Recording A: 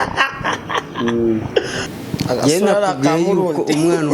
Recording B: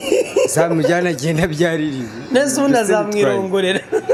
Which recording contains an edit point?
A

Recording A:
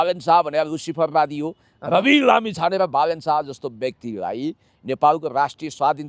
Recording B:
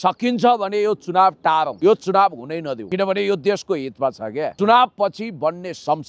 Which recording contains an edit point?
B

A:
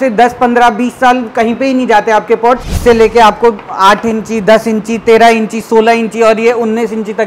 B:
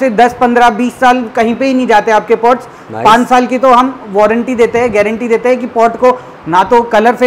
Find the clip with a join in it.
A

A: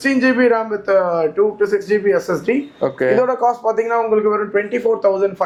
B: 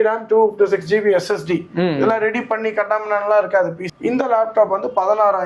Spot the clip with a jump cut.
B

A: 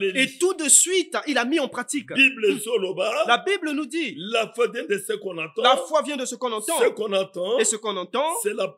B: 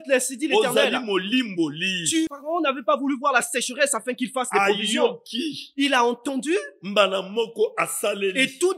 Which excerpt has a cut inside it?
B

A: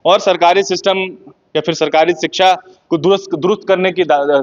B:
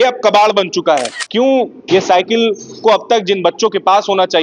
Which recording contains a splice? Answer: B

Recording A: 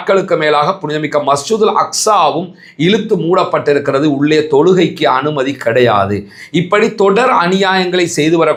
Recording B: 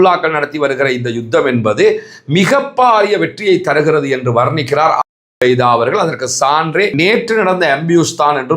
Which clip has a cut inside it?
B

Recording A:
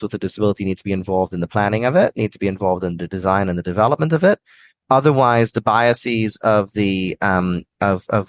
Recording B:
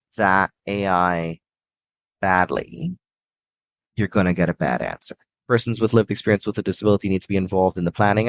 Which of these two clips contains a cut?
B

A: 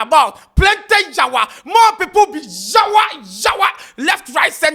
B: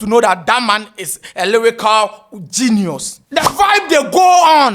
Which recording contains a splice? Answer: B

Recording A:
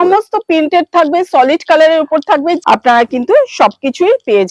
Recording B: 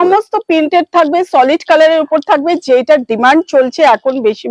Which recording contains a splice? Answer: A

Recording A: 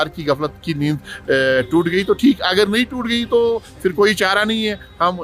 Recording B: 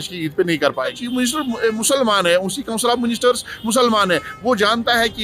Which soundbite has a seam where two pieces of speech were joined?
B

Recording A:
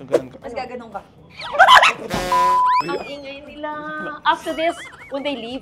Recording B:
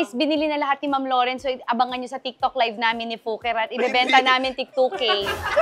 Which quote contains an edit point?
A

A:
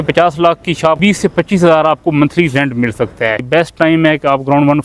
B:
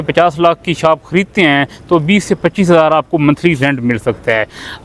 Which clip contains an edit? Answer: A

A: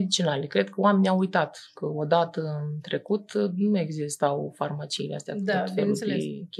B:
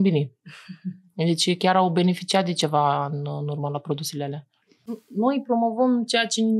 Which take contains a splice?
B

